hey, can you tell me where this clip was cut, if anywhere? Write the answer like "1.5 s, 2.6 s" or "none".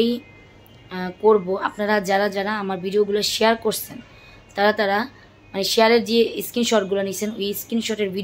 none

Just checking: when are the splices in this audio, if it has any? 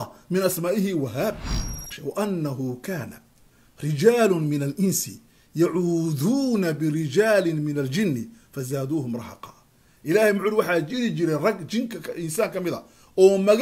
1.8 s

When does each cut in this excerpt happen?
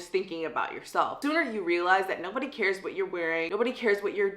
1.2 s, 3.5 s

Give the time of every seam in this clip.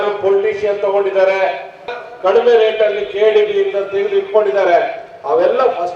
1.9 s

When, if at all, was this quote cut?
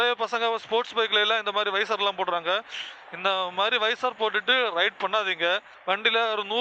5.7 s

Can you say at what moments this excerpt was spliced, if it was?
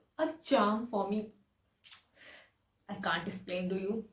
none

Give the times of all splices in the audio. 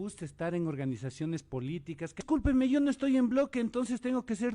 2.2 s

